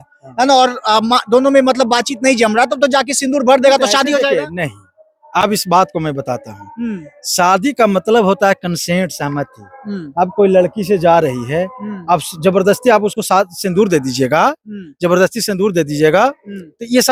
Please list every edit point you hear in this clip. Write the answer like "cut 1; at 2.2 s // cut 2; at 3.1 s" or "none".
none